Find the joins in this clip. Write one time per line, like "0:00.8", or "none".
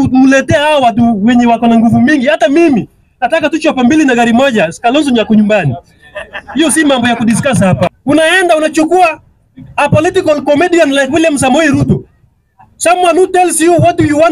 0:08.0